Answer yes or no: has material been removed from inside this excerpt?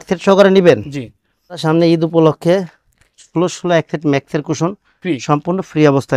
yes